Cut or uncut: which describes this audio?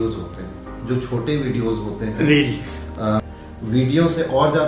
cut